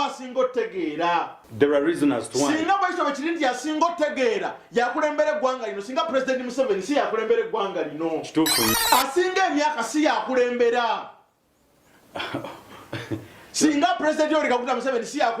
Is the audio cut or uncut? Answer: cut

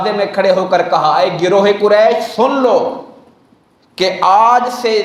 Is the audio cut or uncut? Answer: uncut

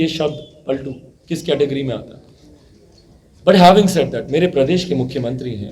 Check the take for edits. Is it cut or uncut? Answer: uncut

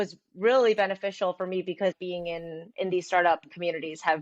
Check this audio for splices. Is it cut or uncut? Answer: cut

